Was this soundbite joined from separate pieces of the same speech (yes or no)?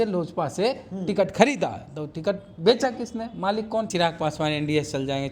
yes